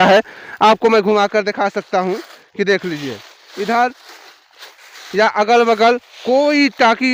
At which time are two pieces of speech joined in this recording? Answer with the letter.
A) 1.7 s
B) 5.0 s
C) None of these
C